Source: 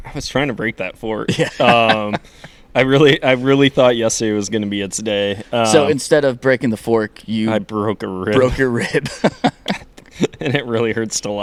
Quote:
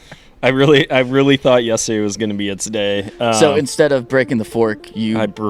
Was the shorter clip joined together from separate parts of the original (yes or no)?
no